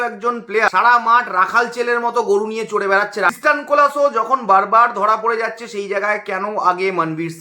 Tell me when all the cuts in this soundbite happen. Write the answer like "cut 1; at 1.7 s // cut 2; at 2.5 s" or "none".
cut 1; at 0.7 s // cut 2; at 3.3 s